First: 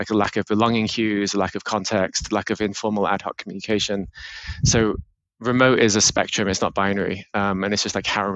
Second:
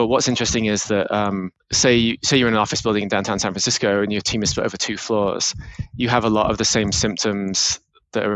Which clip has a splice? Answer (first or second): second